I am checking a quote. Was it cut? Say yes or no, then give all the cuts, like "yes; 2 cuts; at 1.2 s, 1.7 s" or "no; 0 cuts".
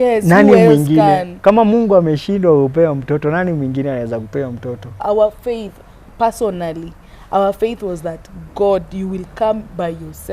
yes; 1 cut; at 5.0 s